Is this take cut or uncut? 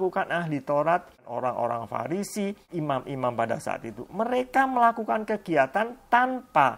cut